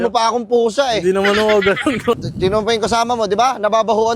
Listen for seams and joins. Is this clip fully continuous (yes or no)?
no